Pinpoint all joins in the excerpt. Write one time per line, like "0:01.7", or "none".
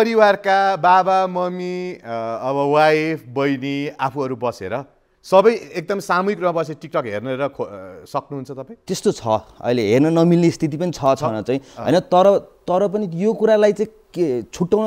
none